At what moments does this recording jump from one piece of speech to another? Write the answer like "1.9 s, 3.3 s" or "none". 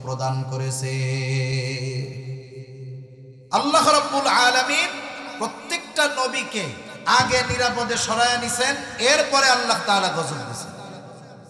2.9 s